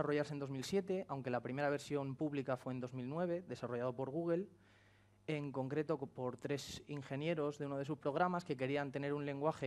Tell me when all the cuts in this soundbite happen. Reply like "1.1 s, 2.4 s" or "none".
3.1 s